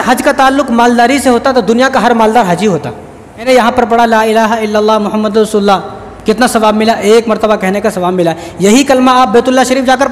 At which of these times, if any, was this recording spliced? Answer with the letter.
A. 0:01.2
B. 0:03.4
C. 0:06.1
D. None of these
B